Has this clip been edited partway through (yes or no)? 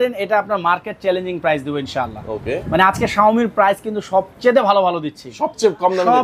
no